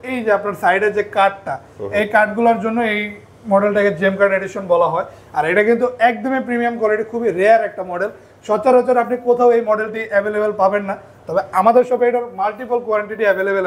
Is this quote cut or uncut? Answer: uncut